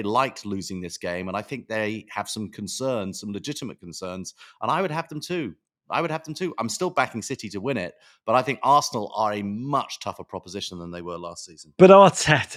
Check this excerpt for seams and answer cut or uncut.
uncut